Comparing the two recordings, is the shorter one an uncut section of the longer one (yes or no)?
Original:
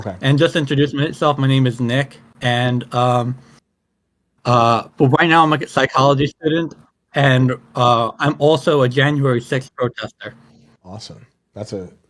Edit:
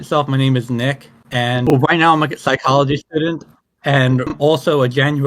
no